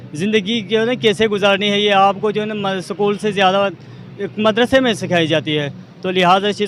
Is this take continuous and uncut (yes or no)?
yes